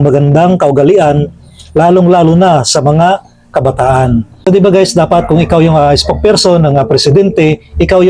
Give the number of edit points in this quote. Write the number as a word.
one